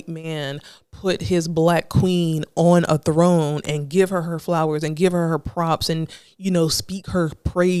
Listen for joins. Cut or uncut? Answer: uncut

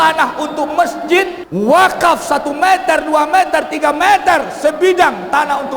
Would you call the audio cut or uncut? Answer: cut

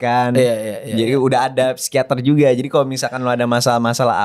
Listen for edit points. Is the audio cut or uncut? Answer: uncut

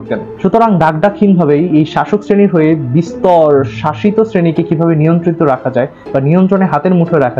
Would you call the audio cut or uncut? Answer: uncut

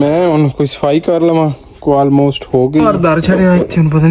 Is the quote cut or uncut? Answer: cut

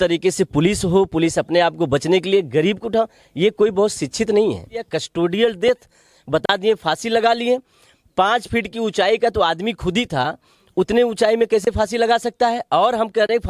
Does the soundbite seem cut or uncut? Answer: cut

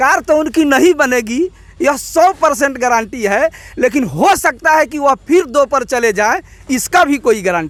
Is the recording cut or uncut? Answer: uncut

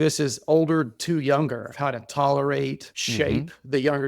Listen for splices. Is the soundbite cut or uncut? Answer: cut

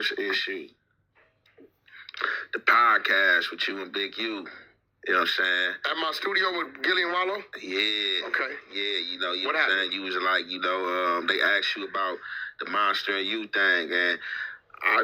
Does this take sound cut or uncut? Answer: uncut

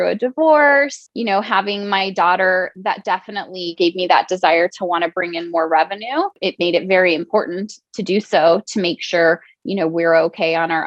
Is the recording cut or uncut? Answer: cut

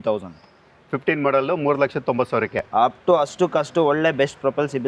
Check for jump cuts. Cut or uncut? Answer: uncut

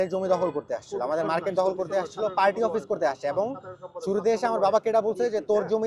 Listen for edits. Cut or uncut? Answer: uncut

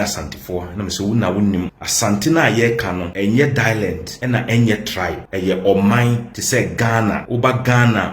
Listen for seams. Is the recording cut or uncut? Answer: cut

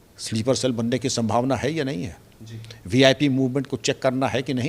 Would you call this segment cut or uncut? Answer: uncut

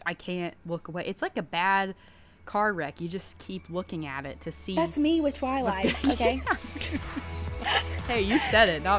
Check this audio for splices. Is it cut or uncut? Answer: uncut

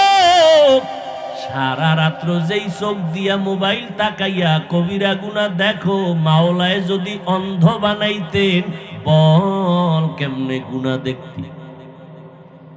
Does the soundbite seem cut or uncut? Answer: cut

